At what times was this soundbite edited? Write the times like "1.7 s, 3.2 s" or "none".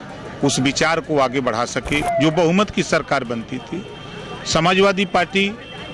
2.0 s